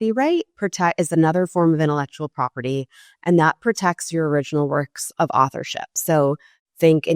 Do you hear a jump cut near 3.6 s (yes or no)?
no